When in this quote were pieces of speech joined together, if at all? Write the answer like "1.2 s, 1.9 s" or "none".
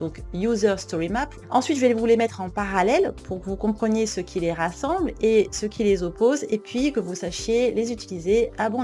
none